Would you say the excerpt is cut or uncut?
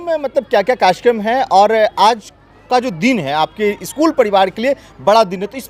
uncut